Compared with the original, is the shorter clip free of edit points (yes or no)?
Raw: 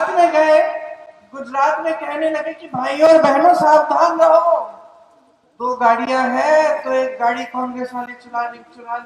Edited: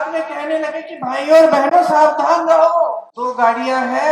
no